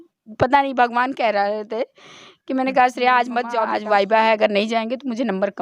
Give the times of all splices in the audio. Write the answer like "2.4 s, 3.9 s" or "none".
3.7 s